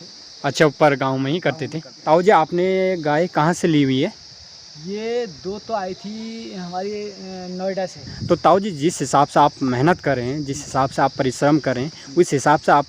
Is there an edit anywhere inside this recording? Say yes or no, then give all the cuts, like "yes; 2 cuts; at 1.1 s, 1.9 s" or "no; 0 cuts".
yes; 2 cuts; at 2.0 s, 8.1 s